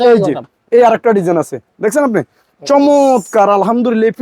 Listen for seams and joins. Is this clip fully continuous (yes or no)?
yes